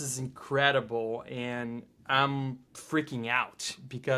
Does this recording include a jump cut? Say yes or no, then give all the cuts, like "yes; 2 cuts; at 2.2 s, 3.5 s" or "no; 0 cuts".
yes; 1 cut; at 2.7 s